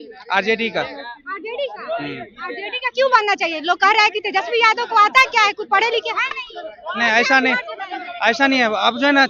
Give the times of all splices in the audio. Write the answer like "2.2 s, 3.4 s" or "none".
none